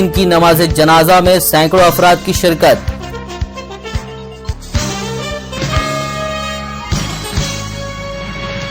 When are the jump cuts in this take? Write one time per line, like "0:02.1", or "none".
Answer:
none

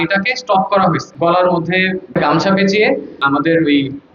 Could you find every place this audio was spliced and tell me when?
0:01.1
0:02.0
0:03.2

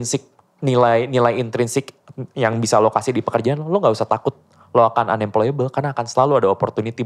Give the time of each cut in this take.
none

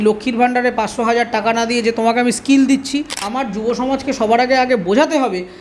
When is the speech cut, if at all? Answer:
0:03.2

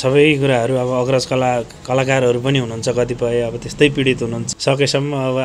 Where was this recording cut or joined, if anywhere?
0:04.4

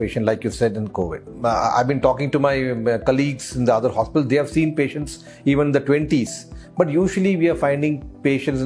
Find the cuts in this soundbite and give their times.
none

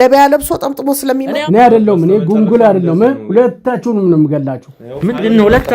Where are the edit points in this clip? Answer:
0:01.4

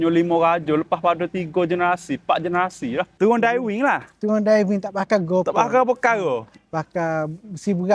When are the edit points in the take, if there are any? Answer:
0:03.1

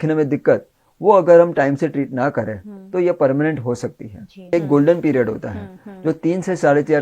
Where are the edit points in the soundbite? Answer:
0:04.5

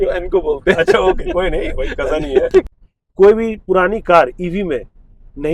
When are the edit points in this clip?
0:02.7

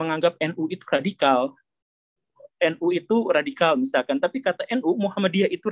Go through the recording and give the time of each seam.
0:02.4

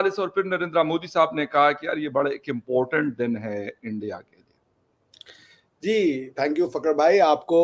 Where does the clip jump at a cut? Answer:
none

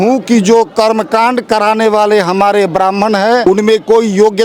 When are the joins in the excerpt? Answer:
0:03.4

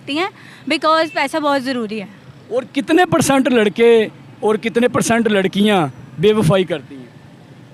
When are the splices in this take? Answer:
none

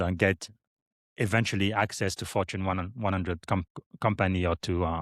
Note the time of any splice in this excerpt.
none

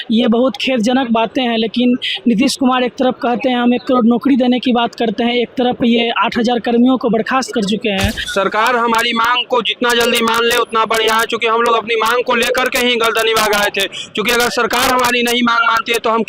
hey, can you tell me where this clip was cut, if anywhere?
0:08.2

